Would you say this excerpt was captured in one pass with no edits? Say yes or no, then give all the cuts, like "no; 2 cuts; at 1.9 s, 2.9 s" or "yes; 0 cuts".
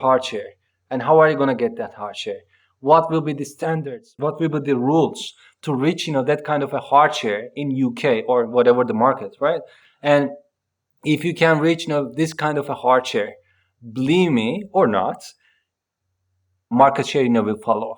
no; 1 cut; at 16.7 s